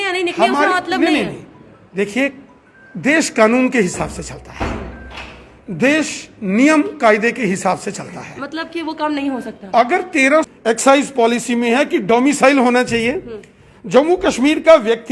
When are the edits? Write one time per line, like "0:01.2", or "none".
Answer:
0:10.5